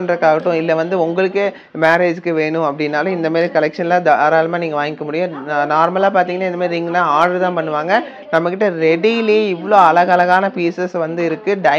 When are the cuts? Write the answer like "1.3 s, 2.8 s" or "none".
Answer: none

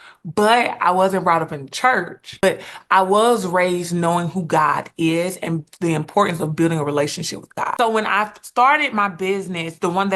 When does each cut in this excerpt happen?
2.4 s, 7.7 s

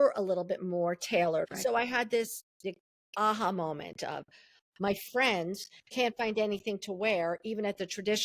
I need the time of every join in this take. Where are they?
1.5 s, 4.6 s

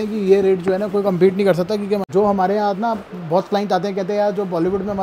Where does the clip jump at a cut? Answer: 2.0 s

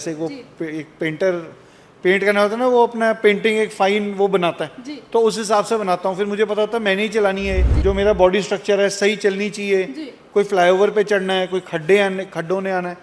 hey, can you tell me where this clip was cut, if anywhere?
7.7 s

